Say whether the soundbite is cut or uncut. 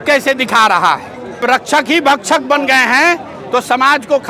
cut